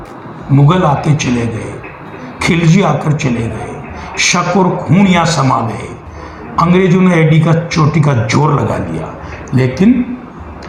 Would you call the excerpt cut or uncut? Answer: uncut